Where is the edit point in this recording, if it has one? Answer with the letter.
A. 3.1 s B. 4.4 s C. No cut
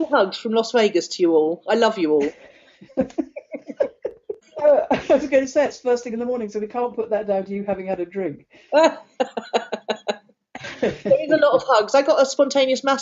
B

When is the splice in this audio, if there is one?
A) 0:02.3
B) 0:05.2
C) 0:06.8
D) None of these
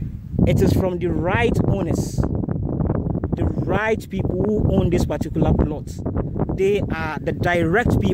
D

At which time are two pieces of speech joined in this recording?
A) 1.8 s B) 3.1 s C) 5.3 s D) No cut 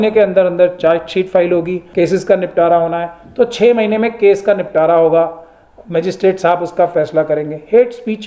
A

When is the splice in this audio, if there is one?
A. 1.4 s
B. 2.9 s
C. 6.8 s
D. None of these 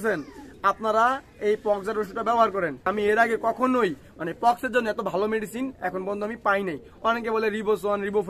B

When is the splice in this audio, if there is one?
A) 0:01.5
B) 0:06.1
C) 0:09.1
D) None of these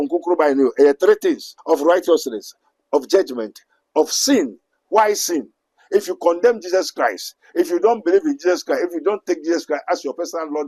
A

